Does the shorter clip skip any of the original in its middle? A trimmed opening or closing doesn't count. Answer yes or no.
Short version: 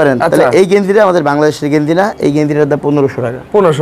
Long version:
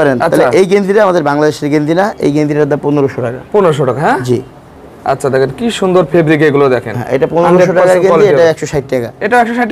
no